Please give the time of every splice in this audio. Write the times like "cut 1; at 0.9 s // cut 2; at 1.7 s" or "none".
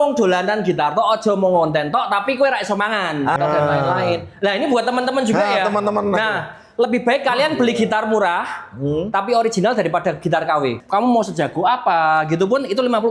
cut 1; at 3.4 s // cut 2; at 10.8 s